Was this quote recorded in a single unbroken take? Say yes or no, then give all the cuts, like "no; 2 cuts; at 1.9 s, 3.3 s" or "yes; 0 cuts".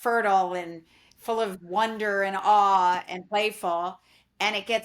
yes; 0 cuts